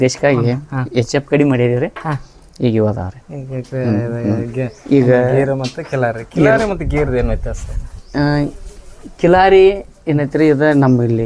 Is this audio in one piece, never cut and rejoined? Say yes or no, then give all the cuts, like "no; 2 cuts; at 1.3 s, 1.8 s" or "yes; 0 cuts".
yes; 0 cuts